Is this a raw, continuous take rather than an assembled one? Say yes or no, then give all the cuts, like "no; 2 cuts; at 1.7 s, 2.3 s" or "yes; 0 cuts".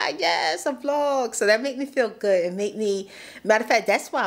yes; 0 cuts